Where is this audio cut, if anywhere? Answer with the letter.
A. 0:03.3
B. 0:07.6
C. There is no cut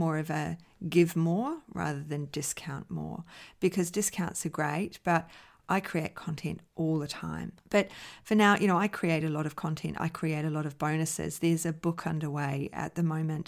B